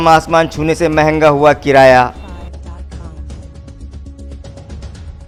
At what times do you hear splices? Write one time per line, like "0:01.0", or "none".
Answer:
none

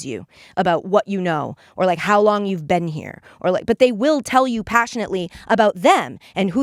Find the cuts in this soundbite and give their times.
none

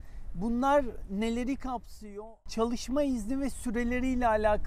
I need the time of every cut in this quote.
0:02.2

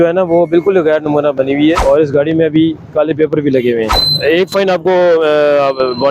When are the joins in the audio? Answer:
0:01.8
0:04.0

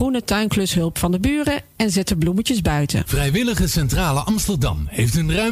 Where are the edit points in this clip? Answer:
0:03.1

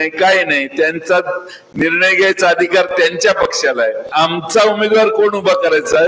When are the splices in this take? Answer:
0:04.1

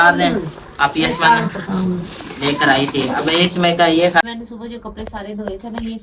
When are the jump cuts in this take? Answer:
0:04.2

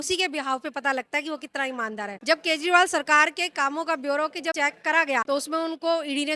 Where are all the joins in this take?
0:05.0

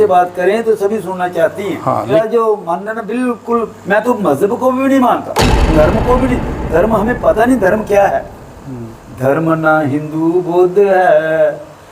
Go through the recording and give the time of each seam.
0:02.1

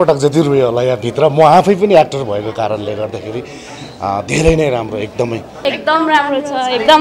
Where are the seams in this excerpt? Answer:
0:05.5

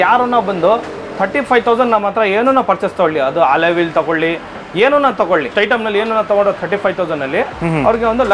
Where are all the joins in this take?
0:05.5

